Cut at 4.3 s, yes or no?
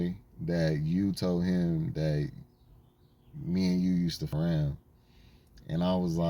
yes